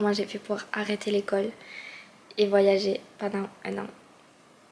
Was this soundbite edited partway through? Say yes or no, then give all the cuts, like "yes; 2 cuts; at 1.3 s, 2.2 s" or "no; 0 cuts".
no; 0 cuts